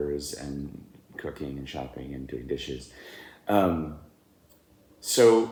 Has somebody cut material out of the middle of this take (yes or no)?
no